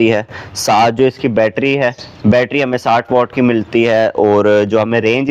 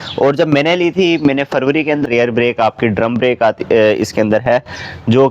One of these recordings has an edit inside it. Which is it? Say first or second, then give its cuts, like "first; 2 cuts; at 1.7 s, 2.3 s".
second; 1 cut; at 2.1 s